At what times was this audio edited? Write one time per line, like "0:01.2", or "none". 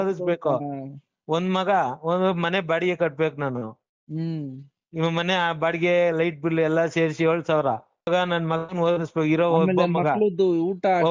0:08.1